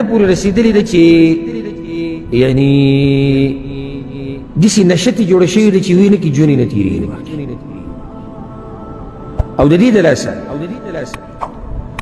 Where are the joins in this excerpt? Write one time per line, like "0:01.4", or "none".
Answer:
none